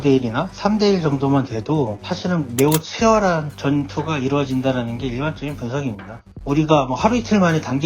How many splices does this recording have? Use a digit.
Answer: 1